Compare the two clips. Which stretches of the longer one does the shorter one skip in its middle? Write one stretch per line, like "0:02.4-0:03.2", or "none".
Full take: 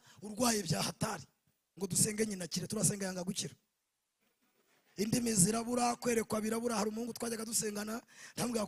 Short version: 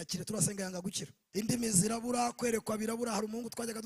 0:03.6-0:04.8